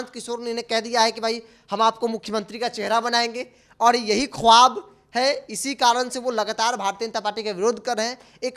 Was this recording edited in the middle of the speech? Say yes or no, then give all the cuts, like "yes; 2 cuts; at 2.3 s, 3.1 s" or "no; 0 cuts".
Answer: no; 0 cuts